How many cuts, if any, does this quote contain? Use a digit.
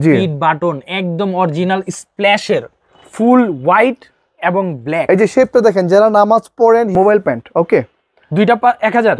1